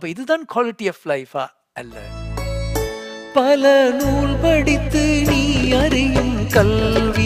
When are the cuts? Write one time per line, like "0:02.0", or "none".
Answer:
0:02.2